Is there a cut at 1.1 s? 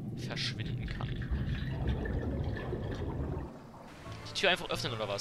no; 1 cut; at 3.9 s

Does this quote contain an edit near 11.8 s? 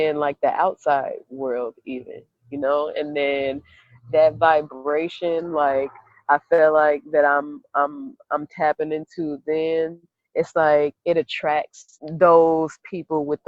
yes; 1 cut; at 11.8 s

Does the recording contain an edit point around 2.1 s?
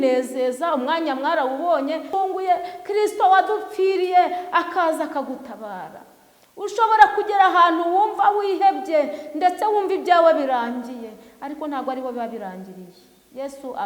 yes; 1 cut; at 2.1 s

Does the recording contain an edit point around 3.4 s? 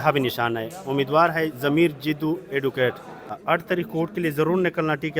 yes; 1 cut; at 3.4 s

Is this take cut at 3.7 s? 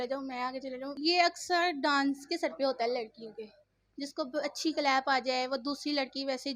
no; 1 cut; at 0.9 s

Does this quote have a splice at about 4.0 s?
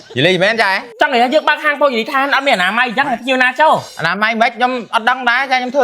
yes; 2 cuts; at 0.8 s, 4.0 s

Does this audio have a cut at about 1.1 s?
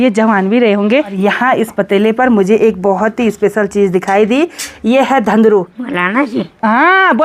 yes; 2 cuts; at 1.1 s, 5.8 s

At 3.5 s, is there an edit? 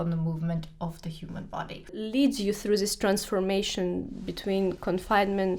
no; 1 cut; at 2.0 s

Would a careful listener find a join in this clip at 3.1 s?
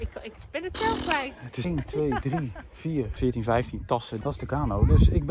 yes; 3 cuts; at 1.6 s, 3.1 s, 4.1 s

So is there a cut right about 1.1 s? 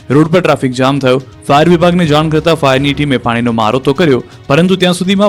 no; 1 cut; at 3.0 s

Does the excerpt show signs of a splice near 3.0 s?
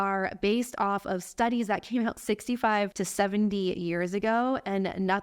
yes; 1 cut; at 3.0 s

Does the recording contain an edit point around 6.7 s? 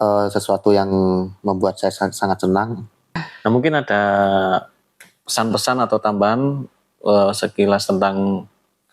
no; 1 cut; at 3.2 s

